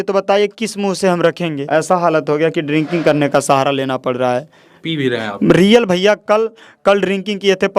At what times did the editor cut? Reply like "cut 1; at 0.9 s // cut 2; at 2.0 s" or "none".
cut 1; at 1.6 s